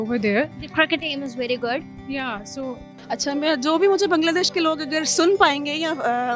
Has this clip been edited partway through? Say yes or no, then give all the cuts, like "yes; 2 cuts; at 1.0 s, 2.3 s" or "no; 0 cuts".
yes; 1 cut; at 2.9 s